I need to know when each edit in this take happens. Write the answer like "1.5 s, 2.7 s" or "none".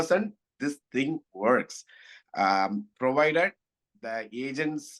none